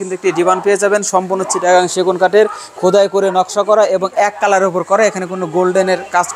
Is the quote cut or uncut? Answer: uncut